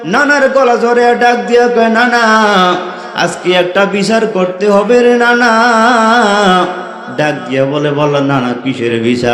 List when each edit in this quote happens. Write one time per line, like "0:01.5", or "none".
none